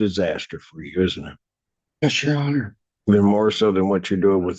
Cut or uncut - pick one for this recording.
uncut